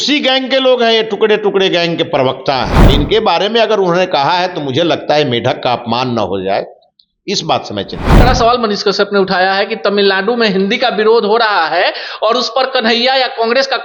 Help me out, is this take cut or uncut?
cut